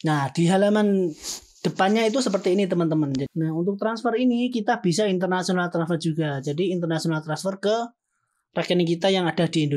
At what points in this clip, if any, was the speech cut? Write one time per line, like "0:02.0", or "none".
0:03.3

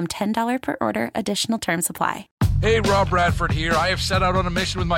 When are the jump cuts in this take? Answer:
0:02.2

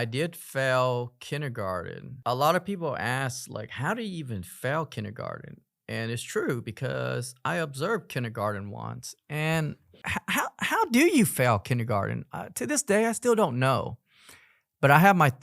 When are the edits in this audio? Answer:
0:02.1
0:10.0

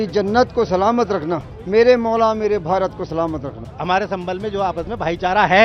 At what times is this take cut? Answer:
0:01.5
0:03.6

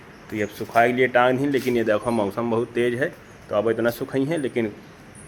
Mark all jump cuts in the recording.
none

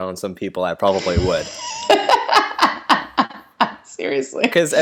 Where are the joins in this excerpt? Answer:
none

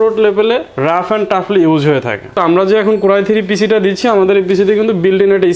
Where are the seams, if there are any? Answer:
0:02.4

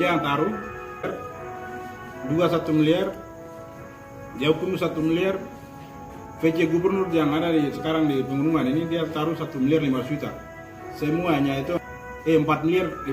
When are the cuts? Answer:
0:01.1

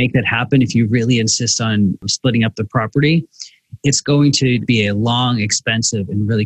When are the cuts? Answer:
0:02.1
0:04.6

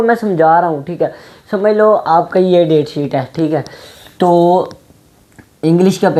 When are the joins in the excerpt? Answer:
none

